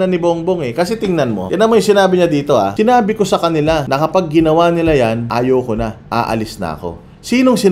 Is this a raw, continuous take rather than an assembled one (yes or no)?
no